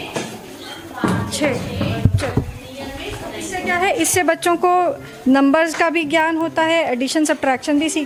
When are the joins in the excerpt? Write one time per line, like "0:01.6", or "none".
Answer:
none